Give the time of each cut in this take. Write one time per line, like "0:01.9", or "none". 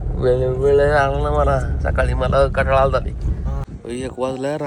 0:03.7